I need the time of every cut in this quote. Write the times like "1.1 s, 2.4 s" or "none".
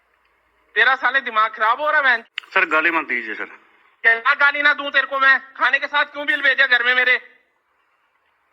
2.2 s